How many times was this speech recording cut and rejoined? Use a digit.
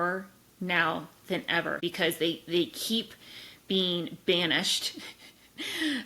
1